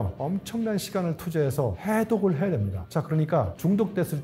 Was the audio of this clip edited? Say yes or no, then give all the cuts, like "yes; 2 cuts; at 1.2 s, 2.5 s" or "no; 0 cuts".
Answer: no; 0 cuts